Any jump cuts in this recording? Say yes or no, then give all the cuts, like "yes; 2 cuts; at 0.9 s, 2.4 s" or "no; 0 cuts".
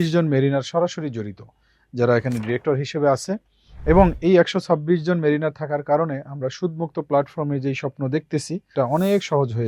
yes; 1 cut; at 8.7 s